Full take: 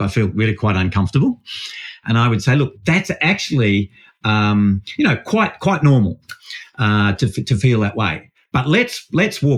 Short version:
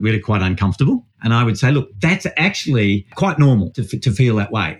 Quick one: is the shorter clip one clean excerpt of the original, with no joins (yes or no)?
no